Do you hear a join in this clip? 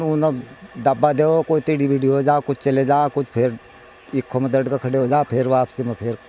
no; 0 cuts

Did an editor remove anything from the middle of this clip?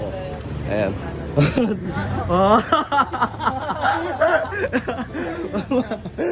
no; 0 cuts

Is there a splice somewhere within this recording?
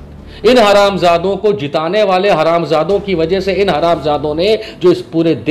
no; 0 cuts

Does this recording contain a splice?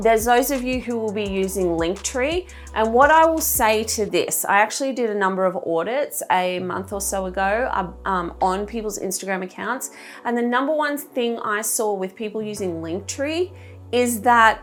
no; 0 cuts

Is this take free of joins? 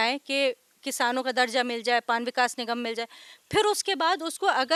yes; 0 cuts

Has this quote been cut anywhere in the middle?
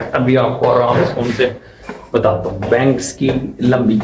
no; 0 cuts

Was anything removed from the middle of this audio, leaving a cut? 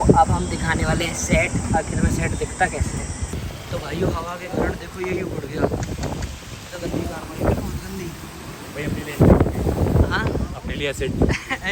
yes; 1 cut; at 3.4 s

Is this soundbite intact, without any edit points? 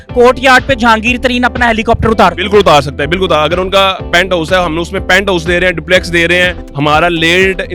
no; 1 cut; at 6.6 s

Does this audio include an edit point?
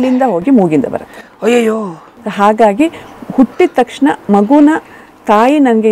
no; 0 cuts

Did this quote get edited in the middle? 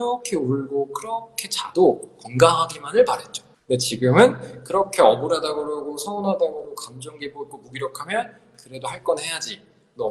no; 0 cuts

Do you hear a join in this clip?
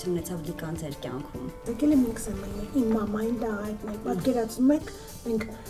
yes; 1 cut; at 1.7 s

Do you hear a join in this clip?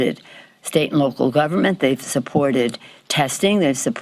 no; 0 cuts

